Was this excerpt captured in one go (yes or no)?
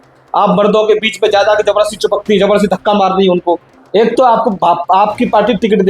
no